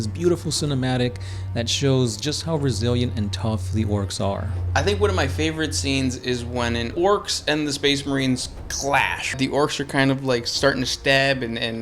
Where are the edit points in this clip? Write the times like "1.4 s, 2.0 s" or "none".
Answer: 6.9 s, 9.3 s